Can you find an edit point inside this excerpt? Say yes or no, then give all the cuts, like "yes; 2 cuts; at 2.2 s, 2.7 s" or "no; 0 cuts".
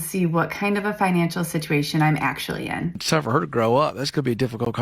yes; 1 cut; at 3.0 s